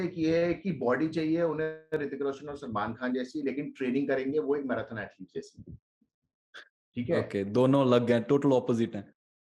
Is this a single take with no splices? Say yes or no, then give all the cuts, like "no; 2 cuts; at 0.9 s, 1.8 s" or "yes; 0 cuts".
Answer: yes; 0 cuts